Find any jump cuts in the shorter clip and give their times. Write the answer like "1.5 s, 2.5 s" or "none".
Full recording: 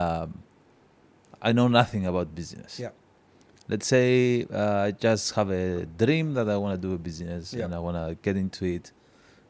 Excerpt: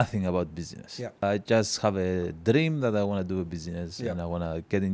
1.2 s